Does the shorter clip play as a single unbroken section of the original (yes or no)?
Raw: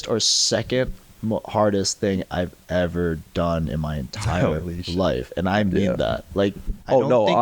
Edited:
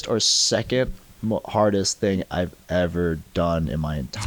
yes